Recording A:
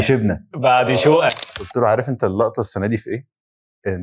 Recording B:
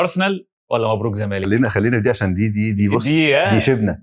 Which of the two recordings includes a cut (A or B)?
A